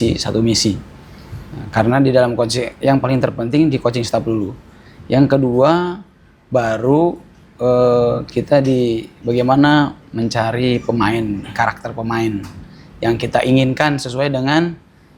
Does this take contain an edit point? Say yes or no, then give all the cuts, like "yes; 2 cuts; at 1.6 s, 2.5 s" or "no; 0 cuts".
no; 0 cuts